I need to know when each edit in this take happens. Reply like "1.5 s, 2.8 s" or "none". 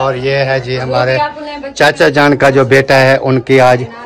none